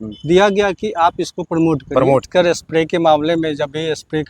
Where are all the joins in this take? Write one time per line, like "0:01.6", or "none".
0:02.3